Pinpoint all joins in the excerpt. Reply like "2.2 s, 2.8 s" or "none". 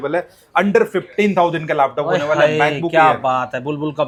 none